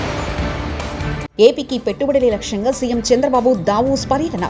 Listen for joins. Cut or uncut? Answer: cut